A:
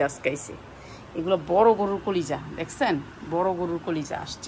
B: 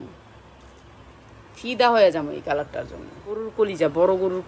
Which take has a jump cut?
B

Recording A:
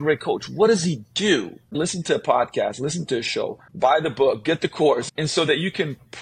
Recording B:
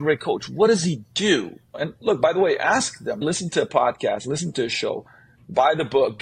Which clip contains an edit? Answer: A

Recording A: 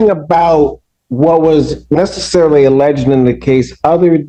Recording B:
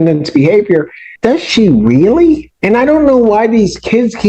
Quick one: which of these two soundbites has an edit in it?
B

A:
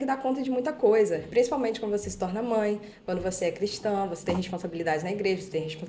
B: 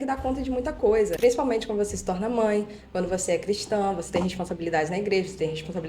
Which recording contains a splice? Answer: B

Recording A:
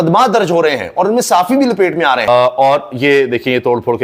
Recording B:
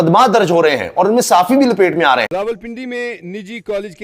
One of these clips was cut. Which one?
B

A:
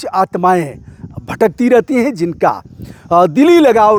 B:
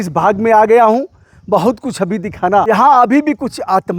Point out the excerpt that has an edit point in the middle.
B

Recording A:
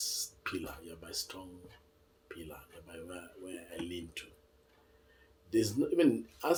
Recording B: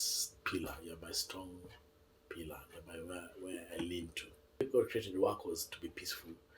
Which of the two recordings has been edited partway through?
B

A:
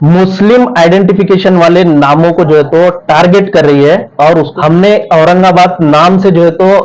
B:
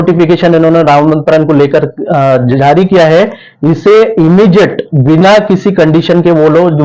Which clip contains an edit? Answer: A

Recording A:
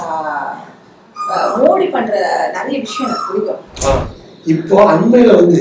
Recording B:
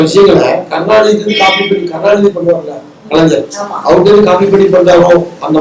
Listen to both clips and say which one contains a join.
A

